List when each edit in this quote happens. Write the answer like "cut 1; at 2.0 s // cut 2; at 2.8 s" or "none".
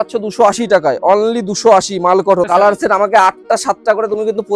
cut 1; at 2.5 s